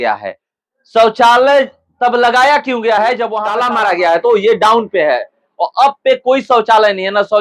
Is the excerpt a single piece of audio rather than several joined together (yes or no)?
yes